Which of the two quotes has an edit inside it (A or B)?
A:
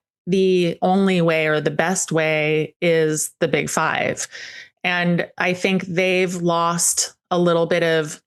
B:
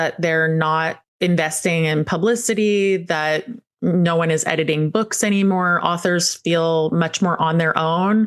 B